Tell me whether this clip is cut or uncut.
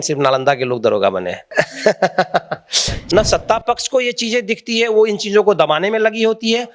cut